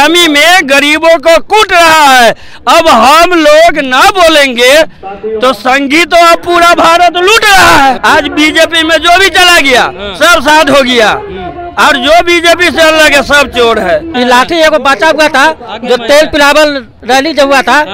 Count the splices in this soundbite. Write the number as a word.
two